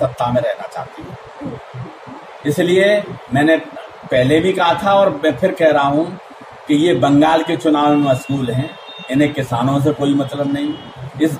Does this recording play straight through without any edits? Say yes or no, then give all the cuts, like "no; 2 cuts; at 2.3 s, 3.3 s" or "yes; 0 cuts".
yes; 0 cuts